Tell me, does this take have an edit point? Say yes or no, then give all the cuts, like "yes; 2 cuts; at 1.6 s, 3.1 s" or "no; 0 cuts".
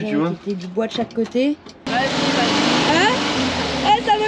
yes; 1 cut; at 1.7 s